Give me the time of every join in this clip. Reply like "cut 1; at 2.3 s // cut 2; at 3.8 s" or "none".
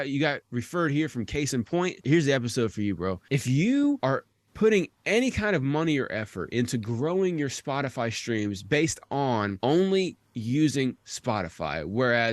cut 1; at 2.1 s // cut 2; at 3.2 s // cut 3; at 4.0 s // cut 4; at 9.5 s